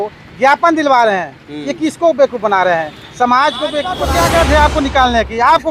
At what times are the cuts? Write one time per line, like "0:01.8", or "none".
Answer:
0:04.0